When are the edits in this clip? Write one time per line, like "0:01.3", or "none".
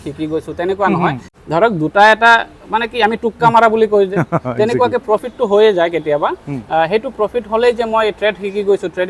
0:01.3